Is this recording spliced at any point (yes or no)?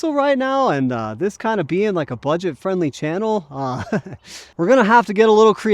no